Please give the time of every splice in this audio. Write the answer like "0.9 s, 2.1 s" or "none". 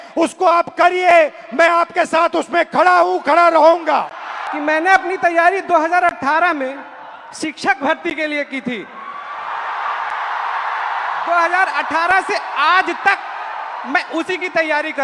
4.4 s